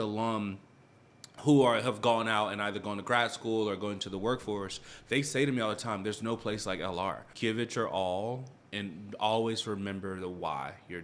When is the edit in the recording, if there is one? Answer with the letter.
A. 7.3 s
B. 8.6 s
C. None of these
A